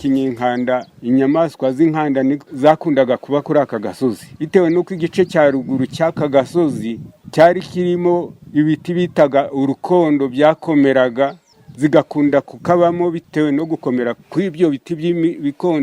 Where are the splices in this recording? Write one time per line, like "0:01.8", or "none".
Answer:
0:00.9
0:02.5
0:04.3